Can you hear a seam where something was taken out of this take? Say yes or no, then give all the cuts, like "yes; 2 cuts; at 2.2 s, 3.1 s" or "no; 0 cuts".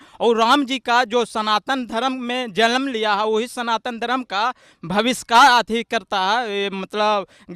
no; 0 cuts